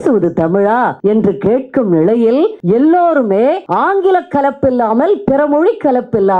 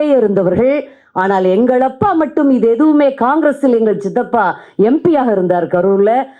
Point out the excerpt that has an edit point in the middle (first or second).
first